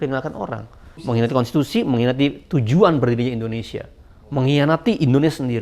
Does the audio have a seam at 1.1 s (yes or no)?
yes